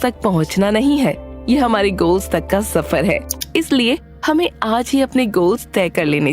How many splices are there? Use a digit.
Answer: 1